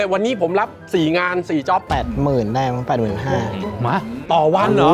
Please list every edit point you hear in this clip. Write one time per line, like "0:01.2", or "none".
0:01.9
0:03.6